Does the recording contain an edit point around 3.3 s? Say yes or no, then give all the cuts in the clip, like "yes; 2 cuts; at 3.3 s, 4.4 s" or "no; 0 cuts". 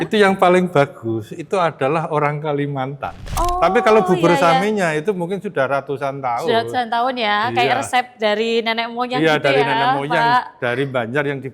yes; 1 cut; at 3.3 s